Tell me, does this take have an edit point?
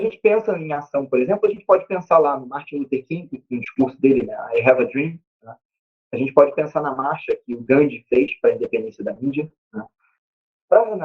yes; 1 cut; at 10.0 s

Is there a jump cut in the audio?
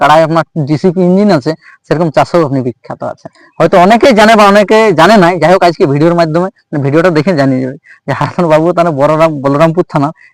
no; 0 cuts

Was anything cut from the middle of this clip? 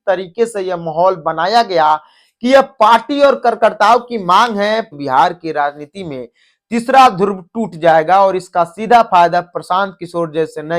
yes; 1 cut; at 4.9 s

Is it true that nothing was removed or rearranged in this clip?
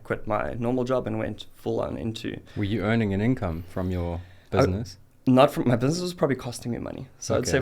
yes; 0 cuts

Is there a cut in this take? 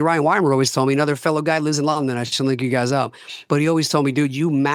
no; 0 cuts

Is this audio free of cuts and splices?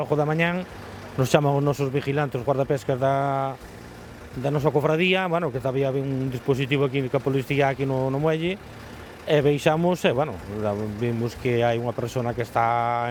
yes; 0 cuts

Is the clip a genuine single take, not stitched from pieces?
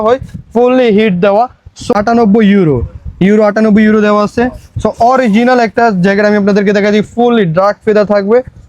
no; 1 cut; at 1.9 s

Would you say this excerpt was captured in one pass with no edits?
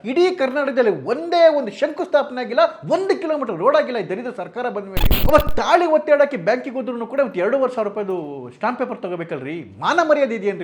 no; 1 cut; at 5.2 s

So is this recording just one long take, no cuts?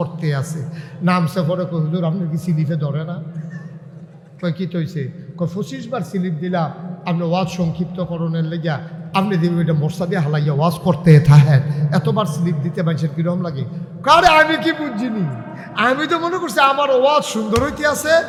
yes; 0 cuts

